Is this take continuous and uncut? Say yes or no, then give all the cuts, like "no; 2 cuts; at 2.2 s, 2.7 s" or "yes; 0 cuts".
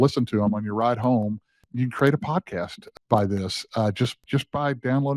no; 3 cuts; at 1.6 s, 2.9 s, 4.2 s